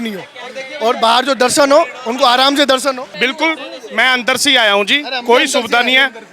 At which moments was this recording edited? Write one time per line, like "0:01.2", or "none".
0:03.1